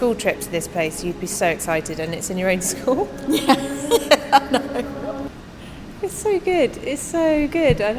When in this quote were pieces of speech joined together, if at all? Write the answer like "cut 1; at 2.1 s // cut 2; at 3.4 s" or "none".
cut 1; at 5.4 s